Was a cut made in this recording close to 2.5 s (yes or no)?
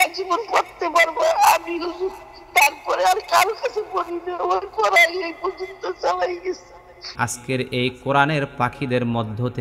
no